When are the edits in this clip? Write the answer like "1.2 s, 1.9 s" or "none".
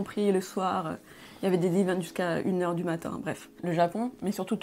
3.6 s